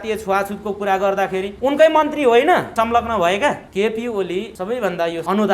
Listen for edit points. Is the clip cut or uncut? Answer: cut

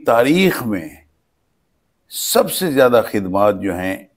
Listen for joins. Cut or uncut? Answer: uncut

